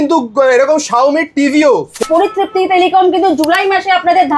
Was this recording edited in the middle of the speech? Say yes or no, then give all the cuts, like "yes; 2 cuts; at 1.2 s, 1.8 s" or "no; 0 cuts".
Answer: yes; 1 cut; at 2.0 s